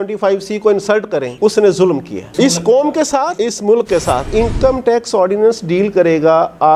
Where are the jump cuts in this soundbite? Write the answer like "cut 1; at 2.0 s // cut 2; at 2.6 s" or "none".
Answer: cut 1; at 4.3 s